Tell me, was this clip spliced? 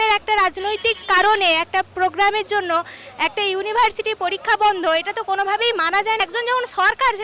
yes; 1 cut; at 6.2 s

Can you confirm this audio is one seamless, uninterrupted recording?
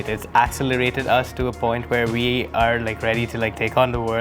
yes; 0 cuts

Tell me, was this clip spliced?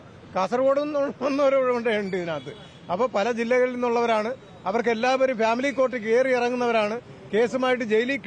no; 0 cuts

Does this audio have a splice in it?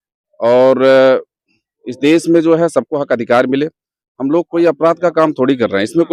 no; 0 cuts

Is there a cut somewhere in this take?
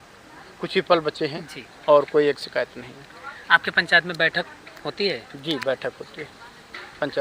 no; 0 cuts

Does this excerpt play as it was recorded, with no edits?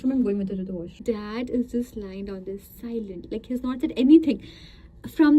no; 1 cut; at 1.0 s

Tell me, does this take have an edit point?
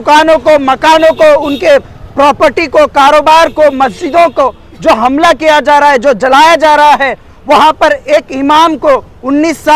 no; 0 cuts

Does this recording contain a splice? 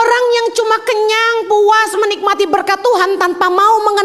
no; 0 cuts

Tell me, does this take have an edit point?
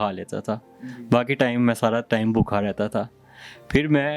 no; 0 cuts

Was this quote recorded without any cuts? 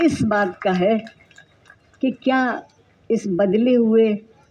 yes; 0 cuts

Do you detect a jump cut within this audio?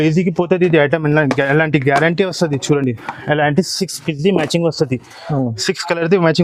no; 0 cuts

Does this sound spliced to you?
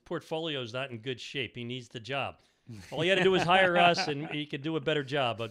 no; 0 cuts

